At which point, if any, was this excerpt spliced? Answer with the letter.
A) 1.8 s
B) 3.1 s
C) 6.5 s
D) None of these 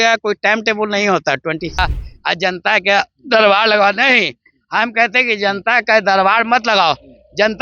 A